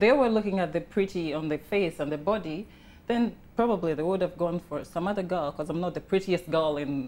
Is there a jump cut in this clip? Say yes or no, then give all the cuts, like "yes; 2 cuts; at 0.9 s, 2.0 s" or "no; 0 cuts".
no; 0 cuts